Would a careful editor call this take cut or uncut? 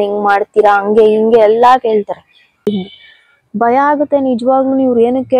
cut